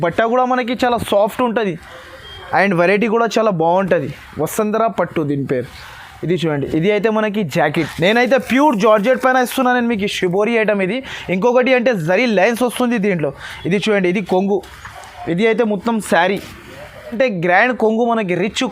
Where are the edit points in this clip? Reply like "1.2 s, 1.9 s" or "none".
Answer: 7.8 s, 17.1 s